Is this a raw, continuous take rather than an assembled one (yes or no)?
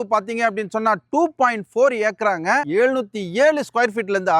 no